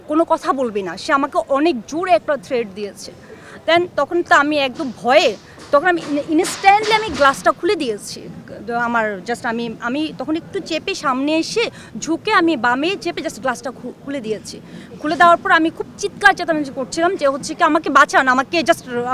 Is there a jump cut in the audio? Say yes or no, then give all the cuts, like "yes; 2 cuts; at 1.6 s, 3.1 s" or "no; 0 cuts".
no; 0 cuts